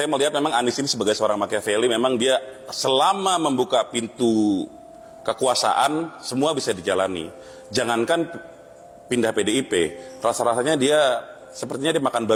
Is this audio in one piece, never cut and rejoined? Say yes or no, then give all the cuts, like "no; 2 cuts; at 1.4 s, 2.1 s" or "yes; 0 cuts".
yes; 0 cuts